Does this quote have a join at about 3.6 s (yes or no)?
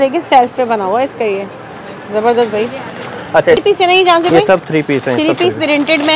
yes